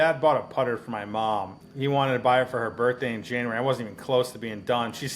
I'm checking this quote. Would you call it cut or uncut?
cut